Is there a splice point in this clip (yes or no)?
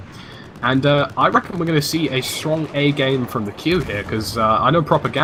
no